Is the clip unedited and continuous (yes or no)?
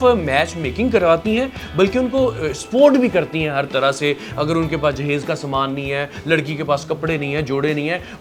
yes